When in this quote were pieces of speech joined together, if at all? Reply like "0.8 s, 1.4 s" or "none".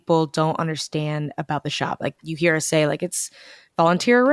2.2 s